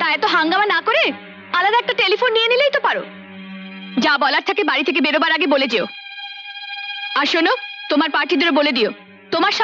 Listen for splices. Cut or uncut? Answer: uncut